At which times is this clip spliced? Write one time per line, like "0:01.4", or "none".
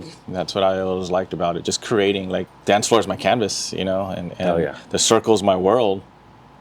0:02.5